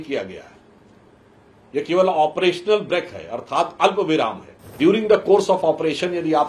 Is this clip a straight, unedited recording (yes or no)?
no